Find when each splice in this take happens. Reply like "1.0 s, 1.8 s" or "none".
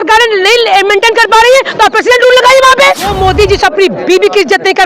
3.1 s